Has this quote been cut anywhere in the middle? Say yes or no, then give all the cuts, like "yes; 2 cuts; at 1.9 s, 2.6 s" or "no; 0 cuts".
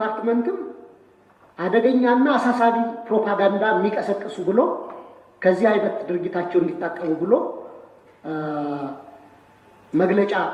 no; 0 cuts